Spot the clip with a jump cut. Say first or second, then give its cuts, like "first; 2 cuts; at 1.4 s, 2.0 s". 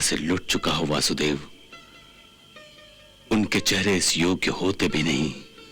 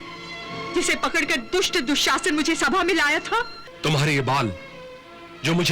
second; 1 cut; at 3.6 s